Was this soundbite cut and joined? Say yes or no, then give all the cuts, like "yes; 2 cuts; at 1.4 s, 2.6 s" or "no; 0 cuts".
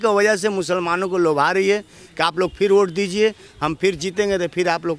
no; 0 cuts